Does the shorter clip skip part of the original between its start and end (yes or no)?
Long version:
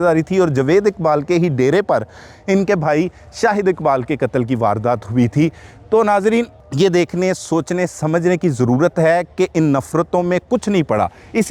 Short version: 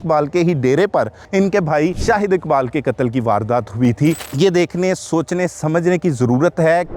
yes